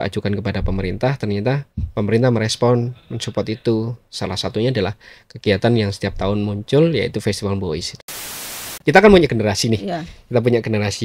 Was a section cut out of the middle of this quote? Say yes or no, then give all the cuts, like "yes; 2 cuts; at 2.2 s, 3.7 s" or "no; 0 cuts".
yes; 1 cut; at 8.3 s